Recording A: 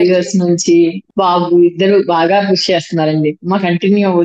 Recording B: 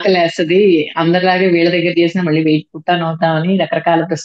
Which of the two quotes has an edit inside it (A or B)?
A